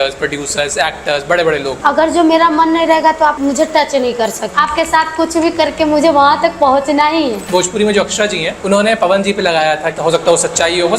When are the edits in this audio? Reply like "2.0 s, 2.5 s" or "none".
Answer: 1.8 s, 3.4 s, 4.4 s, 7.4 s, 8.5 s, 10.0 s